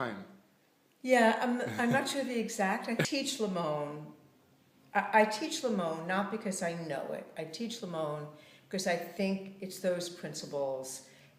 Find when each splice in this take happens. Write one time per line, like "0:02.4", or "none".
none